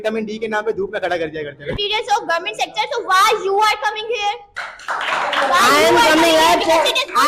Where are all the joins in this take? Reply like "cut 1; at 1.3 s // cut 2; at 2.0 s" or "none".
cut 1; at 1.7 s